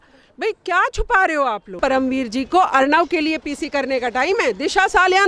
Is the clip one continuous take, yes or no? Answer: no